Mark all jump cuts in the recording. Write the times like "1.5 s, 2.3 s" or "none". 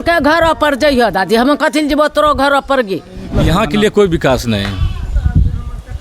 3.2 s